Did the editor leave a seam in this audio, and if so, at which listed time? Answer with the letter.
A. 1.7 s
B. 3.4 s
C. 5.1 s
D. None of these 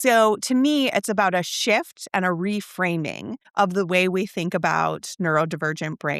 B